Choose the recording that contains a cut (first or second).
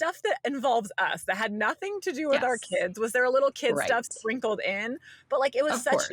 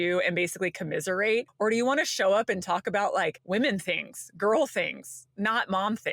second